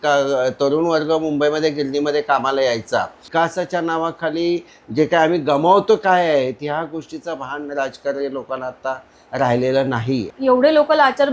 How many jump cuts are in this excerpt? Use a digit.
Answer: 2